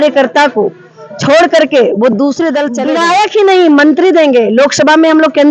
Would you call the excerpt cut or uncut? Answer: cut